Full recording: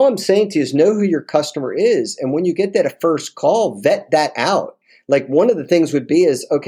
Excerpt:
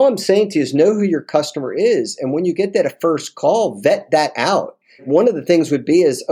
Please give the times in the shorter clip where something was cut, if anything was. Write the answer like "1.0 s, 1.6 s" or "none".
5.0 s